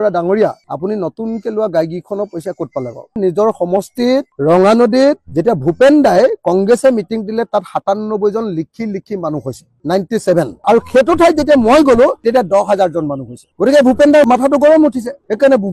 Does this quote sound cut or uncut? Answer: cut